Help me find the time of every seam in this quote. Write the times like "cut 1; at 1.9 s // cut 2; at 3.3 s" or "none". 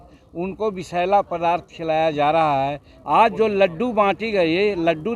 cut 1; at 2.9 s